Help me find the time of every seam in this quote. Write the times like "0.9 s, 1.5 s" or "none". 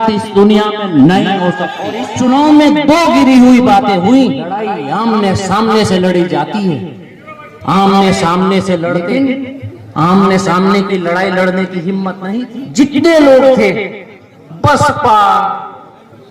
2.0 s, 4.7 s, 9.0 s, 12.2 s